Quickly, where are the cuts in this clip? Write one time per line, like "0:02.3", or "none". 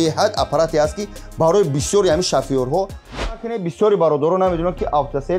0:03.3